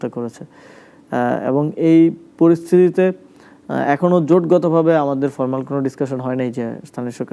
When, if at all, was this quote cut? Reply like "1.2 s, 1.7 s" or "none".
none